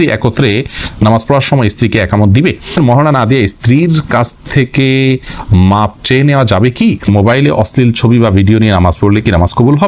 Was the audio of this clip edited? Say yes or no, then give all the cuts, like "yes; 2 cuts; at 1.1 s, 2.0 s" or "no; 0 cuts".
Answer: yes; 2 cuts; at 2.8 s, 7.0 s